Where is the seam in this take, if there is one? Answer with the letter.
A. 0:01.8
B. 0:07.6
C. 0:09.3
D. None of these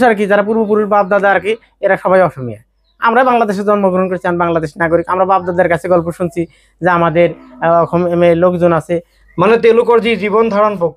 C